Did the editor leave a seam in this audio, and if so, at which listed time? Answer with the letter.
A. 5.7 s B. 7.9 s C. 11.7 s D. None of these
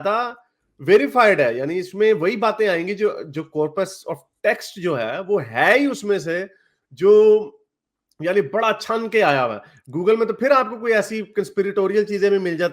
D